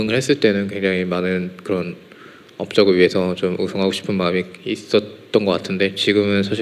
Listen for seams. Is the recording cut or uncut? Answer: uncut